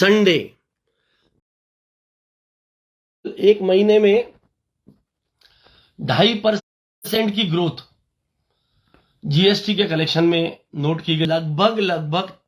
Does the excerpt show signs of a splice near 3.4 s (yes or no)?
no